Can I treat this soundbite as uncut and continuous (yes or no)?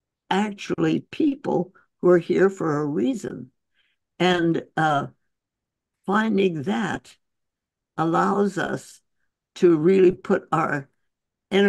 yes